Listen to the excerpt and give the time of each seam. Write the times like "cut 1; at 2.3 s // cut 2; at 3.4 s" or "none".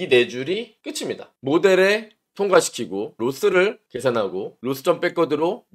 cut 1; at 3.1 s // cut 2; at 4.5 s